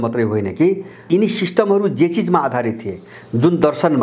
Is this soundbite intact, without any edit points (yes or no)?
no